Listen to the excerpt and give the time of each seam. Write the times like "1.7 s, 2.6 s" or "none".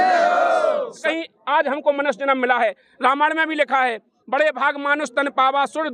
1.0 s